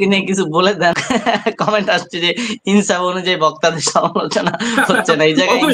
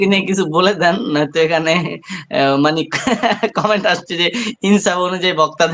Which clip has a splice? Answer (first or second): first